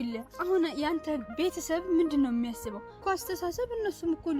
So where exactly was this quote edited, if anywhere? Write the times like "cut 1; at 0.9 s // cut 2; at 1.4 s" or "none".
cut 1; at 3.0 s